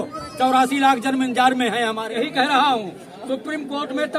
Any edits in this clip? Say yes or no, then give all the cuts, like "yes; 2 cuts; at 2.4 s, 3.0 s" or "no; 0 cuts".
yes; 1 cut; at 2.1 s